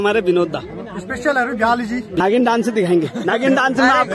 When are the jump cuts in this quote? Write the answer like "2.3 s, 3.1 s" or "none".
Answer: 2.2 s